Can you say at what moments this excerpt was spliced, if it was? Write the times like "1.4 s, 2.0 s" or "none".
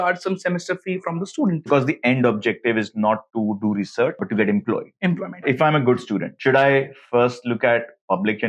1.6 s, 4.2 s, 5.4 s